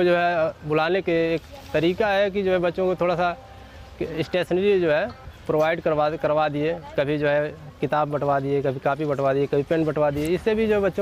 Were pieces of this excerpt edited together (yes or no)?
no